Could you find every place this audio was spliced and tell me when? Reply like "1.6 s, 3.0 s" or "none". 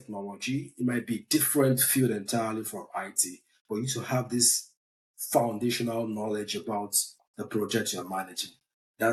none